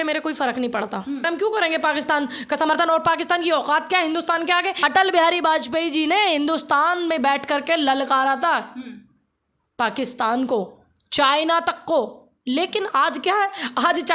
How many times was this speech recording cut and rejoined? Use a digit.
2